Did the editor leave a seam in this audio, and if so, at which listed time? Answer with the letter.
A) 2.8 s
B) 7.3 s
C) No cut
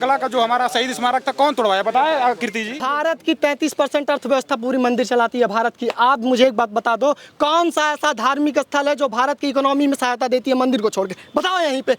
A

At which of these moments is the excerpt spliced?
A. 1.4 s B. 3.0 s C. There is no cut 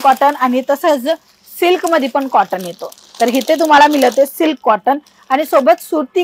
C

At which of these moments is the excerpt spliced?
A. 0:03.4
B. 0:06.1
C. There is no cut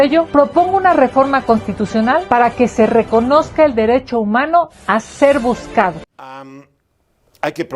B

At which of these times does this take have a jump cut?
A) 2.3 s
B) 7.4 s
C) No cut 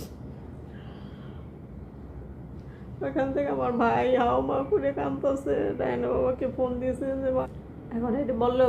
B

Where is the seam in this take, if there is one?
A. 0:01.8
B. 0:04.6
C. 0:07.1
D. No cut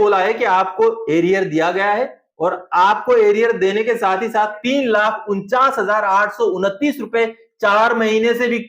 B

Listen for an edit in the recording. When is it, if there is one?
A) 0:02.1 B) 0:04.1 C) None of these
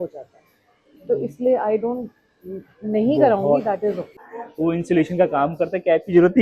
B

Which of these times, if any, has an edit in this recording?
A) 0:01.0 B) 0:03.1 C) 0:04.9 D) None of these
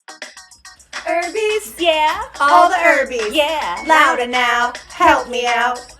A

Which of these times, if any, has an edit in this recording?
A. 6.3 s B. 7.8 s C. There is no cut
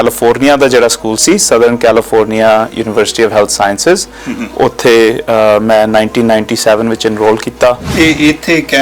B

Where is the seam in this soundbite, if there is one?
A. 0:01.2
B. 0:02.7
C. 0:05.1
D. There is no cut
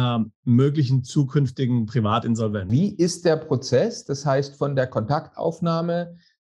B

